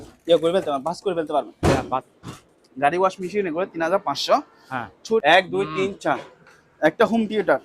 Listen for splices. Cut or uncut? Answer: cut